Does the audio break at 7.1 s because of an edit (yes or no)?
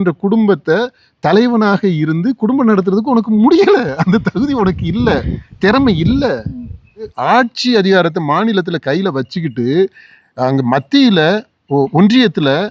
yes